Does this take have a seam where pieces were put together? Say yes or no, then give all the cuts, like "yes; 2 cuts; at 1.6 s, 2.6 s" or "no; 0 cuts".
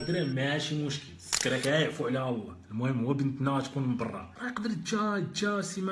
yes; 1 cut; at 4.3 s